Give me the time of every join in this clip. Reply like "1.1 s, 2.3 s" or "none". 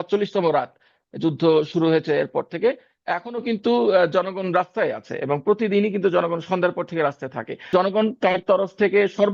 7.7 s